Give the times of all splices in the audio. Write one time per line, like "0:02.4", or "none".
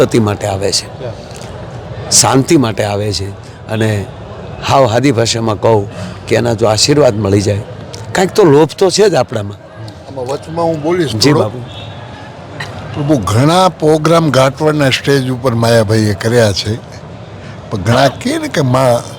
none